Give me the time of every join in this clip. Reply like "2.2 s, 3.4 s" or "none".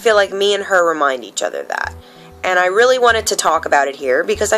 none